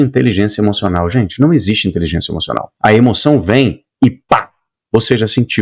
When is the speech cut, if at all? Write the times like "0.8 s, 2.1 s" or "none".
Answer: 2.7 s